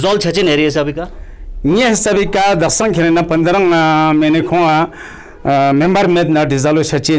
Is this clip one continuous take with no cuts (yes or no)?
yes